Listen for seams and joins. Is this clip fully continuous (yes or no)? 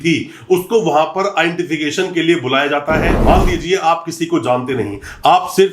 no